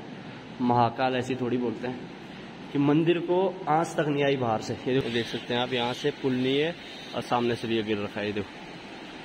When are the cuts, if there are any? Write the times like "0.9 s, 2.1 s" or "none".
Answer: 5.0 s

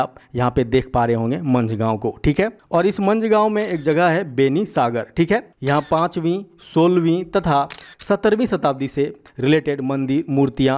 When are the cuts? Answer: none

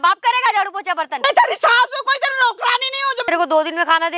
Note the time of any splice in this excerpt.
1.1 s, 3.2 s

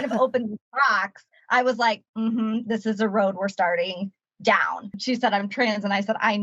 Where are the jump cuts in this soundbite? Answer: 4.9 s

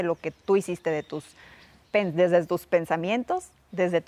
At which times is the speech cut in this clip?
none

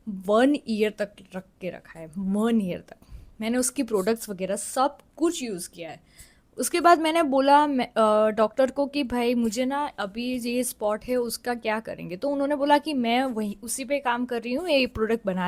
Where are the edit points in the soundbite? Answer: none

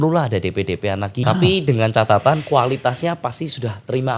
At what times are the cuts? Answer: 1.2 s

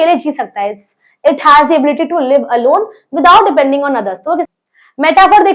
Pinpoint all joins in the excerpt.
4.5 s

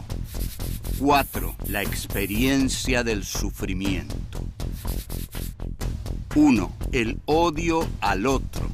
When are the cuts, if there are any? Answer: 6.7 s

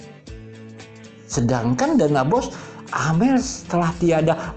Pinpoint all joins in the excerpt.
1.3 s

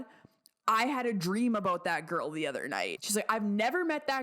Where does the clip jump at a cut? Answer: 3.0 s

